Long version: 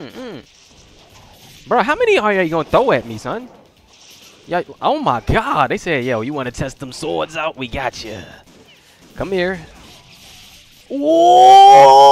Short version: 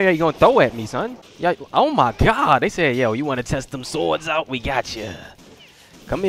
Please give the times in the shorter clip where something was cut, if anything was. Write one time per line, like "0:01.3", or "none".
0:01.2